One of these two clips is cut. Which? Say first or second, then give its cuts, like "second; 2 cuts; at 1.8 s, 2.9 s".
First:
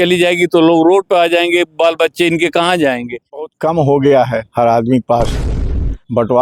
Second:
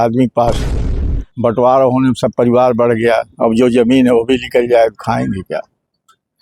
first; 1 cut; at 3.4 s